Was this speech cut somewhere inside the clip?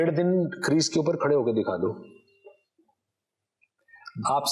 no; 0 cuts

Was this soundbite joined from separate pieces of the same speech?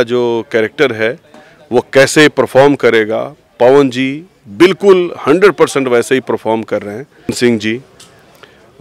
yes; 1 cut; at 7.4 s

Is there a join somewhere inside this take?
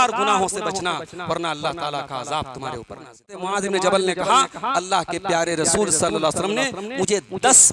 yes; 1 cut; at 3.5 s

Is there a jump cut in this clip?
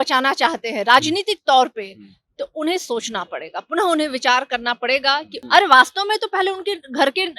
yes; 1 cut; at 5.3 s

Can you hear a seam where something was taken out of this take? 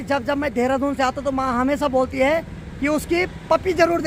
no; 0 cuts

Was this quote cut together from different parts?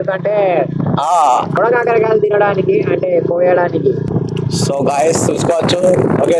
yes; 2 cuts; at 1.6 s, 4.1 s

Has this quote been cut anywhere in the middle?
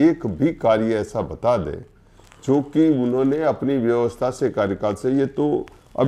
no; 0 cuts

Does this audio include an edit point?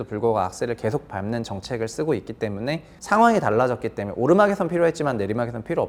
no; 0 cuts

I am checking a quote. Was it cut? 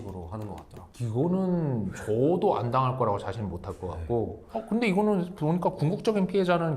yes; 1 cut; at 4.4 s

